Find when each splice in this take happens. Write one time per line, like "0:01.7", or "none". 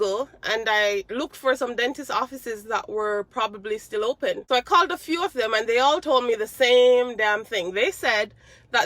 0:04.4